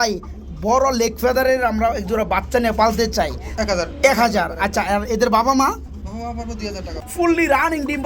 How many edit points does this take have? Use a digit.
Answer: 2